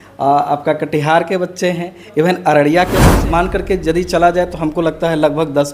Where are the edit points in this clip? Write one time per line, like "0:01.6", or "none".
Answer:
0:03.1